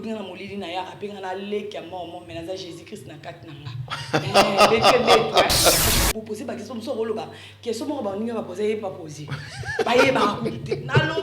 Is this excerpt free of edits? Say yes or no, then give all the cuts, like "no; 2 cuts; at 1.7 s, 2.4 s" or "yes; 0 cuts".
no; 1 cut; at 5.8 s